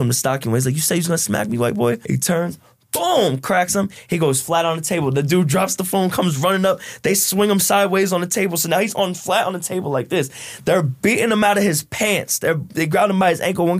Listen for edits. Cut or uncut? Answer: cut